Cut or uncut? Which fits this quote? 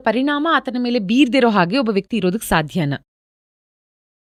uncut